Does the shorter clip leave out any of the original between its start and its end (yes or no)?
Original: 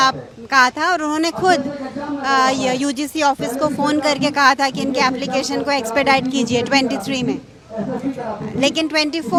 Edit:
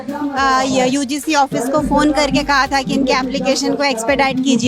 no